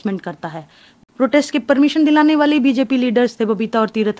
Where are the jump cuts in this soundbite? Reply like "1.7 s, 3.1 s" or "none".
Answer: 0.9 s